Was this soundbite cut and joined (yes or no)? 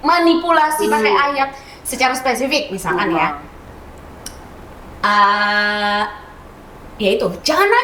no